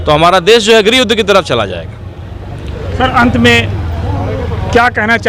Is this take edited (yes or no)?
no